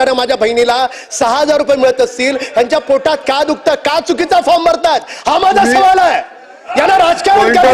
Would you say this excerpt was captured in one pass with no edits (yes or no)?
yes